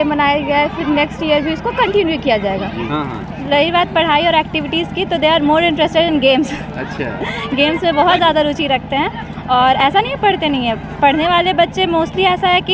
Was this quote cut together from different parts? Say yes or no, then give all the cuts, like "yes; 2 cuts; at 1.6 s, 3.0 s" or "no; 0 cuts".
yes; 1 cut; at 2.9 s